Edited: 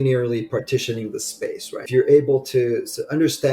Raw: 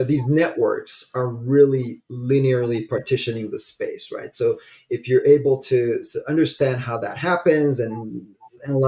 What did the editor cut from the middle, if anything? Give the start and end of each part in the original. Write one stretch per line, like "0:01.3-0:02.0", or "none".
0:04.2-0:05.0